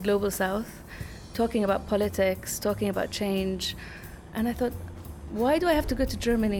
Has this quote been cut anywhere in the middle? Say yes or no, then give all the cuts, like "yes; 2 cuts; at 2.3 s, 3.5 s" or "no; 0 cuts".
no; 0 cuts